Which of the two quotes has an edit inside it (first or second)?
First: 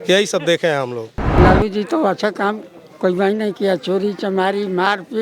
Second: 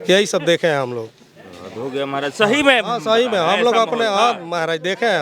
first